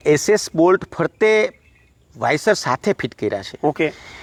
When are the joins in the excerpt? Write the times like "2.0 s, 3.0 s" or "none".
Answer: none